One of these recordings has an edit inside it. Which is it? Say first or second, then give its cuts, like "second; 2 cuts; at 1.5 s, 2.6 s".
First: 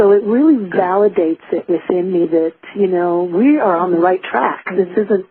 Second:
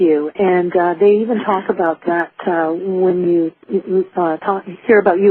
second; 1 cut; at 2.9 s